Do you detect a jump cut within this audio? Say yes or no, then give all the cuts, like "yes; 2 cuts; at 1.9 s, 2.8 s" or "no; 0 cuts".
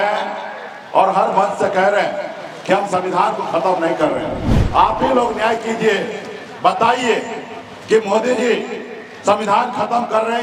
no; 0 cuts